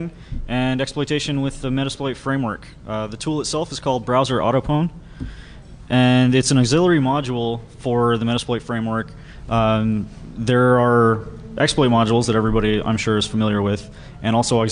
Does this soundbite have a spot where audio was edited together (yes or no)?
no